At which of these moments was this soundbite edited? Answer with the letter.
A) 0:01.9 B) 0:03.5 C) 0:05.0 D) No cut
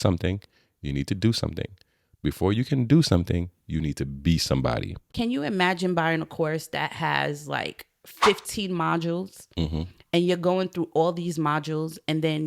C